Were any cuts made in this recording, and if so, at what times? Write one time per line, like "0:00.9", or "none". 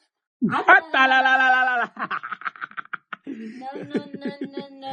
none